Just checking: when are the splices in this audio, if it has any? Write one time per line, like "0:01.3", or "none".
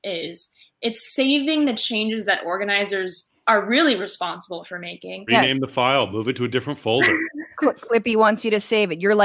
0:05.2

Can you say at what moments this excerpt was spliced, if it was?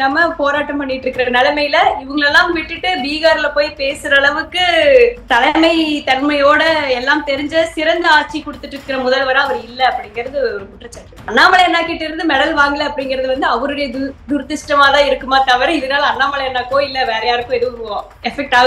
0:05.2
0:11.3

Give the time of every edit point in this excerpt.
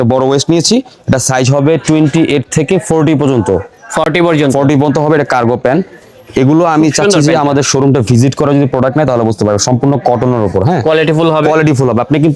none

